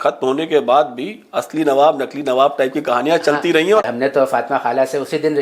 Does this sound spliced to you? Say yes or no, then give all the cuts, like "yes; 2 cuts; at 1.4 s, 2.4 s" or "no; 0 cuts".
yes; 1 cut; at 3.8 s